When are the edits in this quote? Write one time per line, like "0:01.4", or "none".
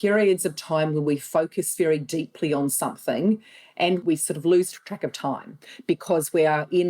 0:04.0